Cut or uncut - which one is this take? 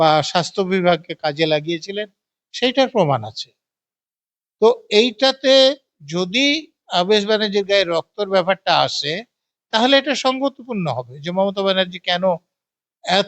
uncut